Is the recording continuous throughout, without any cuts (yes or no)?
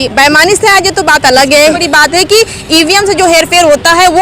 no